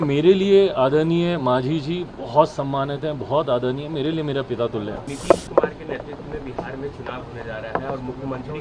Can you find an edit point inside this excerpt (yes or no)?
yes